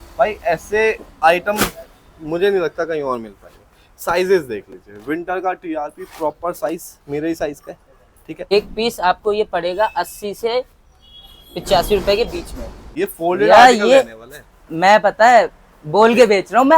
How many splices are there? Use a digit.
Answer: 2